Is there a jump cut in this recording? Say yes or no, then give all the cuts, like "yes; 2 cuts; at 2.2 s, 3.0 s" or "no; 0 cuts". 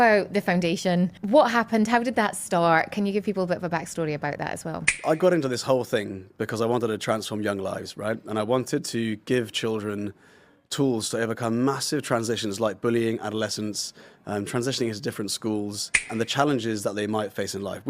yes; 3 cuts; at 1.2 s, 4.9 s, 16.1 s